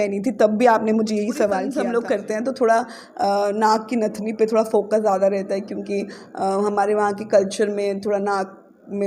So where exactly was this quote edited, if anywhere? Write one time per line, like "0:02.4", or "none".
0:01.7